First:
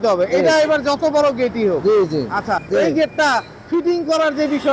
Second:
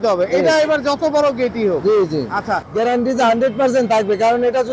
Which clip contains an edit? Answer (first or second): second